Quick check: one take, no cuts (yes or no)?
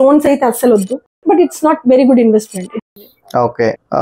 no